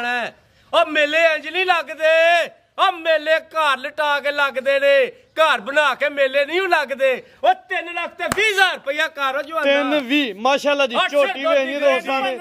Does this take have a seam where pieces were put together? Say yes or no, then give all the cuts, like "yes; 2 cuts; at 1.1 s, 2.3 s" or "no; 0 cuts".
no; 0 cuts